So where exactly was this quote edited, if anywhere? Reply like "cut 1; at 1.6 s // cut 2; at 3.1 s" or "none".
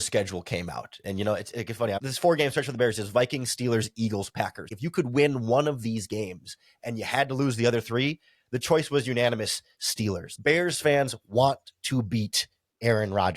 cut 1; at 2.0 s // cut 2; at 4.7 s // cut 3; at 10.3 s